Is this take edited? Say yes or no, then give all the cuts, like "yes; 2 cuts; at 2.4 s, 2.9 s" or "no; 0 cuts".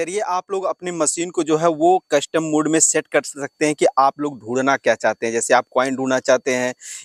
no; 0 cuts